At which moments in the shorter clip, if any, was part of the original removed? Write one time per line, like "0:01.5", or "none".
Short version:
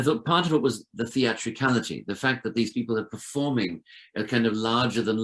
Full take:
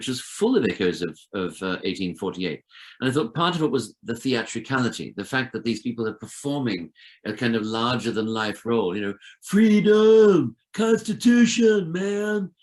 none

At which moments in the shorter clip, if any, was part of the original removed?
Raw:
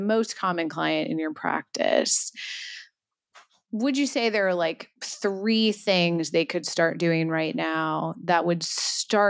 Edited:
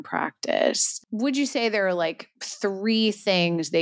0:00.9

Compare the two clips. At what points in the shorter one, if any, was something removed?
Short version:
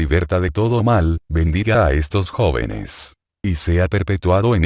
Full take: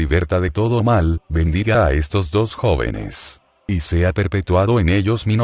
0:02.3

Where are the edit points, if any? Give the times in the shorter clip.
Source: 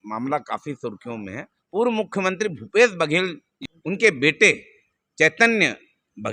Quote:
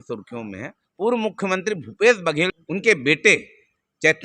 0:02.6

